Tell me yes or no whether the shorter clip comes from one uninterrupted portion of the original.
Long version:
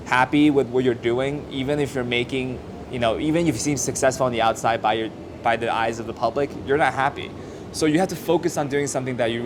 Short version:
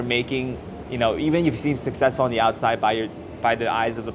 yes